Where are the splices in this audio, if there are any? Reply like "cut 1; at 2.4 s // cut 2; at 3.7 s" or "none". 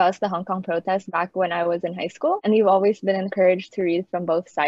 none